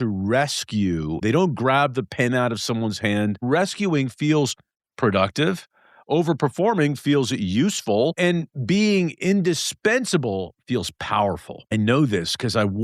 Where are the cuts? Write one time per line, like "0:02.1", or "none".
0:01.2
0:03.4
0:08.1
0:11.7